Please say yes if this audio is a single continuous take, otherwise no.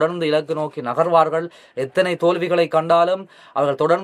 yes